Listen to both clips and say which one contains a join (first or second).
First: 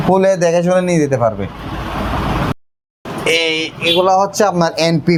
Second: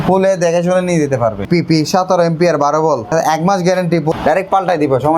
second